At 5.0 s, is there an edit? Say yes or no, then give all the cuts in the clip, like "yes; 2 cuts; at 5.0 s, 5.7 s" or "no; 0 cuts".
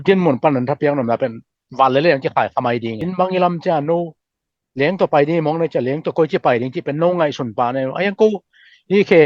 no; 1 cut; at 3.0 s